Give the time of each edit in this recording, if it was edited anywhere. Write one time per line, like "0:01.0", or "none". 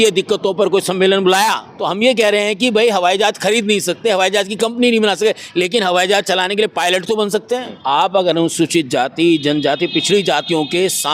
0:01.7
0:07.7